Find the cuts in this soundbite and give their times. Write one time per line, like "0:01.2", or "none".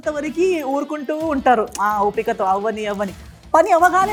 none